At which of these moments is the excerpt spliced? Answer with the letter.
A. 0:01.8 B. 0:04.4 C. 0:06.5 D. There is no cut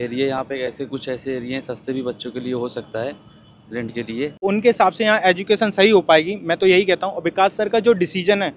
B